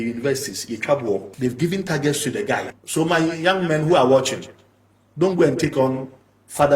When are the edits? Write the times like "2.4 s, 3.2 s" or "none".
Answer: 1.3 s, 2.7 s